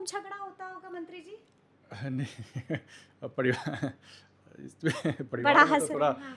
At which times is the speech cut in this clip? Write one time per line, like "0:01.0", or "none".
none